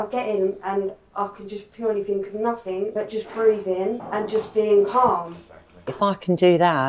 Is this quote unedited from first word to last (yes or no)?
no